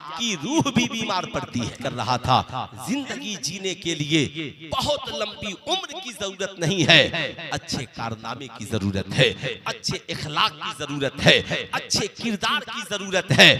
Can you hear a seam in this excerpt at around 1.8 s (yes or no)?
yes